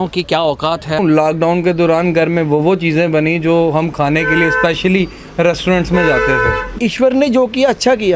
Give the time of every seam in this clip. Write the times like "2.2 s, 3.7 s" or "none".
1.0 s, 6.7 s

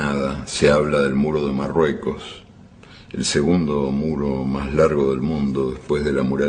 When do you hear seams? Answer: 5.1 s

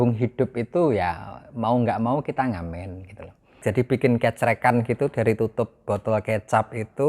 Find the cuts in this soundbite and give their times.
3.6 s

